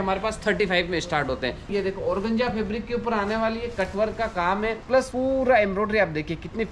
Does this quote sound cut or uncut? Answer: cut